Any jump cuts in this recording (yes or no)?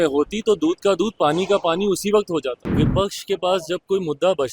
yes